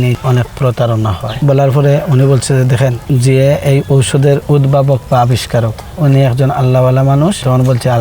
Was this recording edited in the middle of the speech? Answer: yes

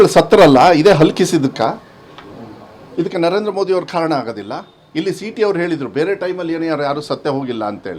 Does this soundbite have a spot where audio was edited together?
no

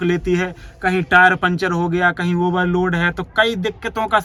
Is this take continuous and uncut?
yes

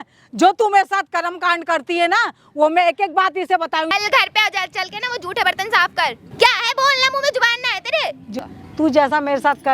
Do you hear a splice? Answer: yes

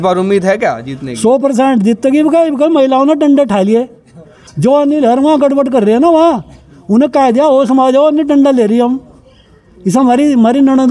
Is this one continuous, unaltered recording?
yes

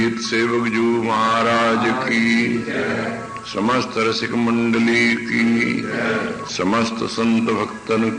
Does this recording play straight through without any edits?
yes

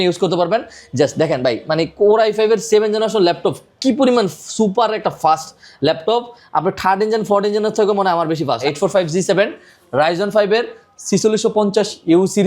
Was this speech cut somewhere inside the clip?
yes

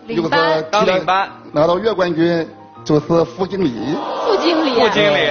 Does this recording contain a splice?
yes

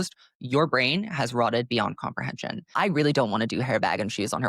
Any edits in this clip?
yes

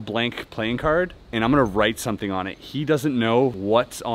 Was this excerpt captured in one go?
yes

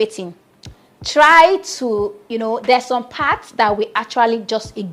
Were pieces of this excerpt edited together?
no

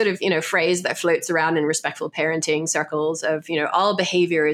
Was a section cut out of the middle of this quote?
no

